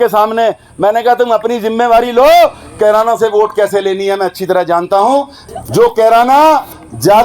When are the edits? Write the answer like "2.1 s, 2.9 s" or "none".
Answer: 5.4 s